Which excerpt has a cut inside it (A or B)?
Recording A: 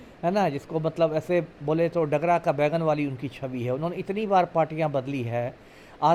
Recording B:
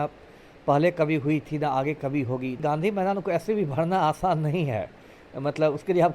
B